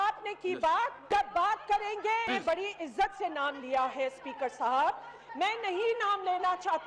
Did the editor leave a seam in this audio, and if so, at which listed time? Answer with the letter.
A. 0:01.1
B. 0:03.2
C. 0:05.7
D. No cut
D